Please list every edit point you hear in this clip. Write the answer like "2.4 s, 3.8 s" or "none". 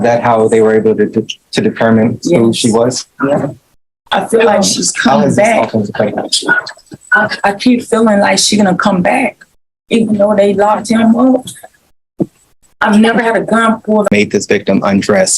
14.1 s